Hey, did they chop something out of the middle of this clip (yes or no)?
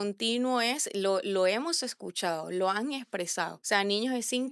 yes